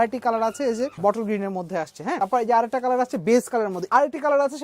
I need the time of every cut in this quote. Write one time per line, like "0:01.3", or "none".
0:00.9
0:02.2
0:03.8